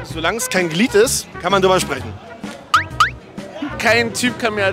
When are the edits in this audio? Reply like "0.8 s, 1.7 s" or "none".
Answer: 2.5 s, 3.7 s